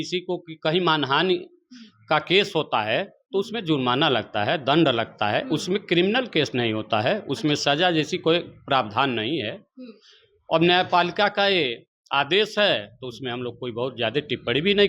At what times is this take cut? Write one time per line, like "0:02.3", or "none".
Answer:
none